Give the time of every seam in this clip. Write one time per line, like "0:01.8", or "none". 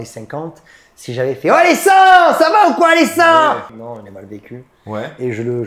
0:03.7